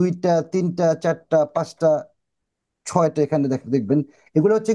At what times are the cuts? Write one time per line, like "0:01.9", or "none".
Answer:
none